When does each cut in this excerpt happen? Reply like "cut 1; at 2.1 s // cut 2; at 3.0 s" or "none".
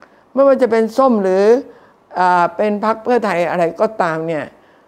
none